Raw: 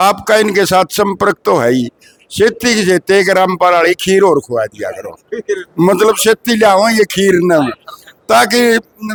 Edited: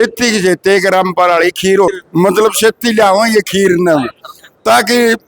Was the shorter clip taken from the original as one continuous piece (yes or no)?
no